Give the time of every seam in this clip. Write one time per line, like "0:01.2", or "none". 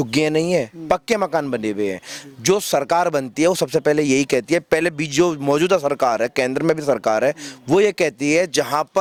none